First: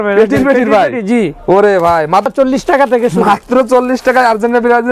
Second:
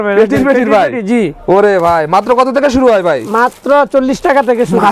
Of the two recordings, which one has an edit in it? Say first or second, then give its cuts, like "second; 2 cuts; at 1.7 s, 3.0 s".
first; 1 cut; at 2.3 s